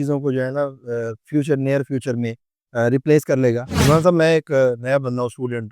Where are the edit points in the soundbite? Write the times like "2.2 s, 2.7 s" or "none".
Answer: 3.8 s